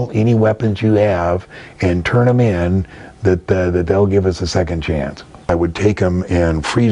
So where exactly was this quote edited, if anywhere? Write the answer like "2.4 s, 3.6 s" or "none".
5.5 s